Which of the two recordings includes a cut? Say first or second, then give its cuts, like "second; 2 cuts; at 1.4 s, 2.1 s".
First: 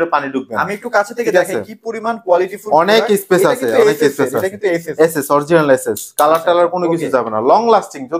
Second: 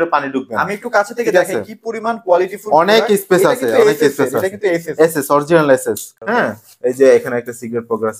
second; 1 cut; at 6.0 s